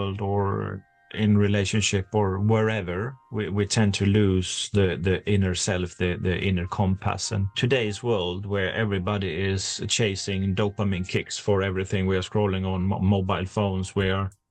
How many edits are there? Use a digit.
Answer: 2